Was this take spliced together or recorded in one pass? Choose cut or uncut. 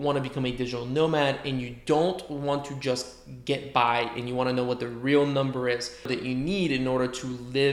cut